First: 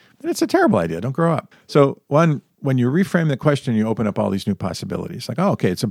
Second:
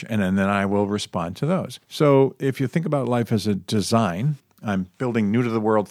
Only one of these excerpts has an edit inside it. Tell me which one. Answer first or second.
first